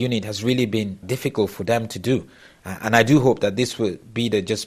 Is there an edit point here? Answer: yes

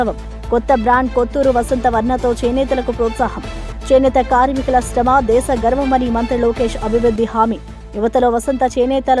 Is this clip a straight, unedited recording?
yes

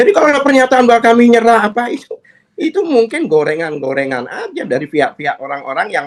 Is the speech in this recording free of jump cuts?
yes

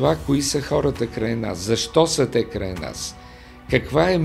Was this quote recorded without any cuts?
yes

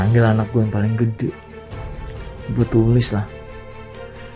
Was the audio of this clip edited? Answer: no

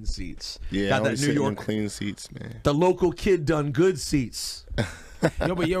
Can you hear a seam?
no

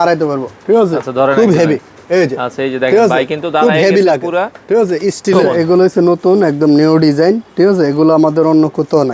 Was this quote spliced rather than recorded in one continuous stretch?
yes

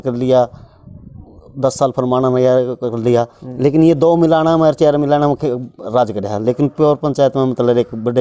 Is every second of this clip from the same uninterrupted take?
yes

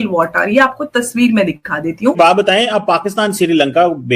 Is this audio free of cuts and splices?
no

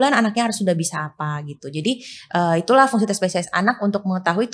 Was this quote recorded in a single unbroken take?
yes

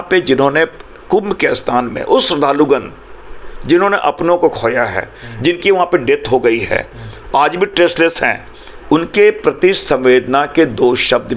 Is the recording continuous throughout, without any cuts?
yes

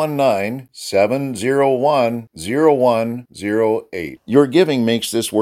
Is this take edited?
no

